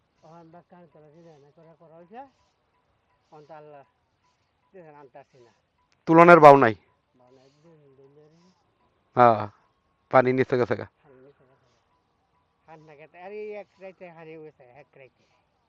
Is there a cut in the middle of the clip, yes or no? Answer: no